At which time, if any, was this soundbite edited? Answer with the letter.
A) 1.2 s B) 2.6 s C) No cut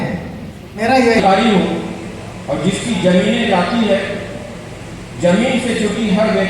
A